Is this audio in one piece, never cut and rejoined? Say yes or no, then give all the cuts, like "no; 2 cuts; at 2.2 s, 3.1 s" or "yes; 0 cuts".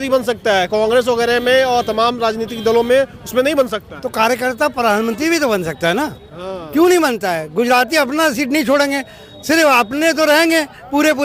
yes; 0 cuts